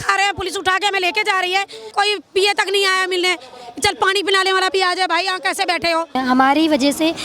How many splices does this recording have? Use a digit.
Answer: 2